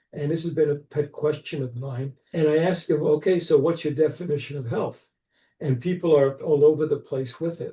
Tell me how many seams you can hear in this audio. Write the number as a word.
one